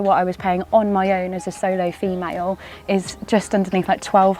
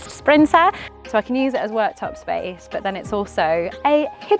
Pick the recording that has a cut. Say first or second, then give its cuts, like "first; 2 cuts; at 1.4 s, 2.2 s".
second; 1 cut; at 0.9 s